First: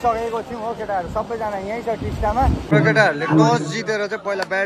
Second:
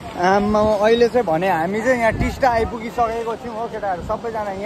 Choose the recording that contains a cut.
first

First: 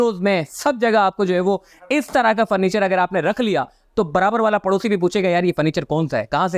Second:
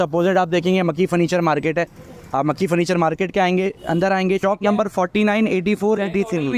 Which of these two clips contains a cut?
second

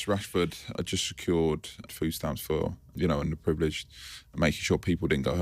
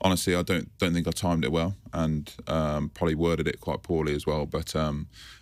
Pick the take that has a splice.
first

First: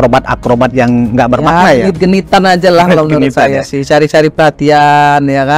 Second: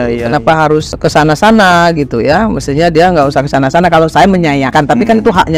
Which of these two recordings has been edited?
second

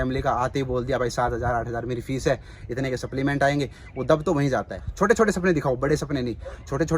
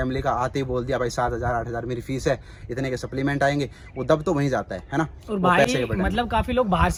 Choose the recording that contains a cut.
first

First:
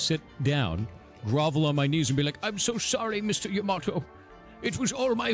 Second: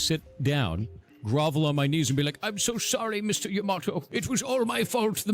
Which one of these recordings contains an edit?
second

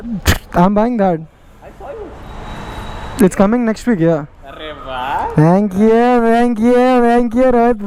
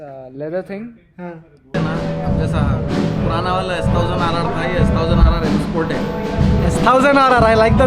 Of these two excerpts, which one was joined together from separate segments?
second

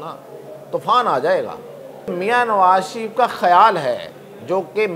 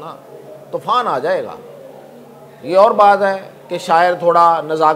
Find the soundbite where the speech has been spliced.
first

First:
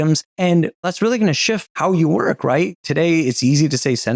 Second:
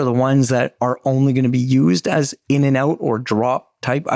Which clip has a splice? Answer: first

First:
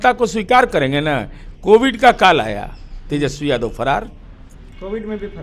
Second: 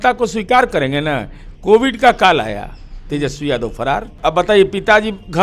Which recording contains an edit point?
second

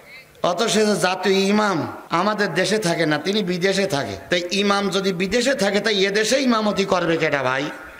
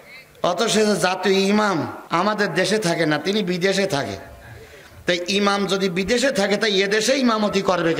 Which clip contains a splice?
first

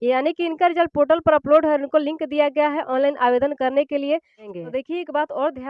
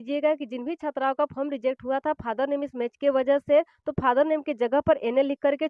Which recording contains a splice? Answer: first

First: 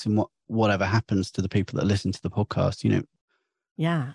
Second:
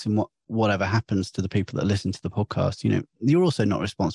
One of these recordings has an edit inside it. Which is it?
first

